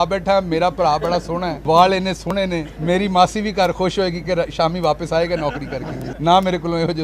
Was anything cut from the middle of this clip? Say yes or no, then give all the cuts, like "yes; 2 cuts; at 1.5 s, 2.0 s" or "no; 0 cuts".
yes; 3 cuts; at 1.5 s, 2.7 s, 6.1 s